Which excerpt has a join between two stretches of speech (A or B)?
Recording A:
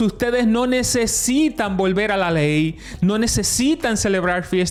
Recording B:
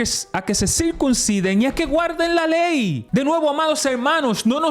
B